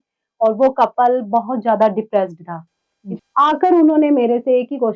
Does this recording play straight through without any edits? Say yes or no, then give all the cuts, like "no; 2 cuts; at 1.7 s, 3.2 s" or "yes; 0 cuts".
no; 1 cut; at 3.1 s